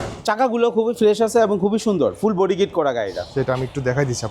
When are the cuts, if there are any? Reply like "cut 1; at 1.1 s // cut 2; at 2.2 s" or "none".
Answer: cut 1; at 3.2 s

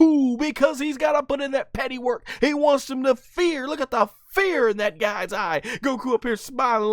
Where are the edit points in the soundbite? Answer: none

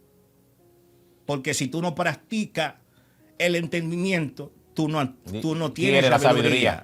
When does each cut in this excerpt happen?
none

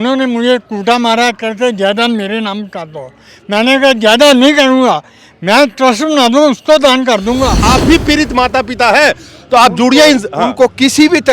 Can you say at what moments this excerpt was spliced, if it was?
cut 1; at 7.6 s

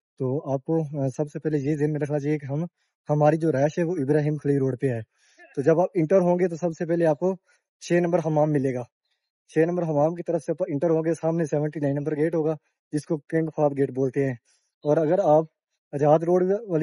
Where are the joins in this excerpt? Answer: none

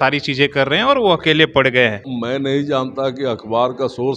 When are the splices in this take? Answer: cut 1; at 2.1 s

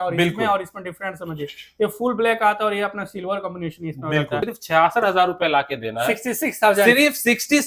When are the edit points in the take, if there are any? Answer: cut 1; at 4.4 s

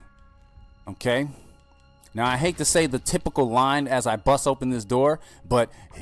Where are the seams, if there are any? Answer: none

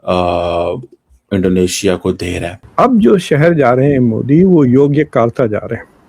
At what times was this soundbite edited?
cut 1; at 2.6 s

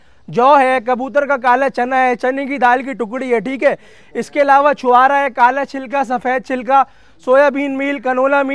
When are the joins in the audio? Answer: none

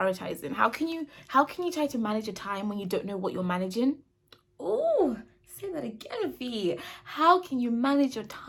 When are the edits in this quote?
none

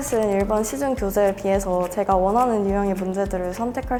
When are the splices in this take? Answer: none

